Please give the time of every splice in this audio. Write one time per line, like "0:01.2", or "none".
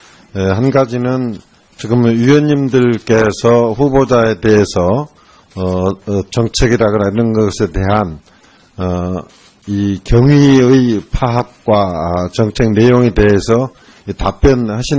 0:05.5